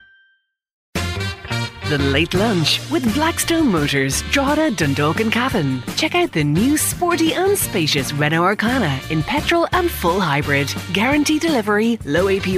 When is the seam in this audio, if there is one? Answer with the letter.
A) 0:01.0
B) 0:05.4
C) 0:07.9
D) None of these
A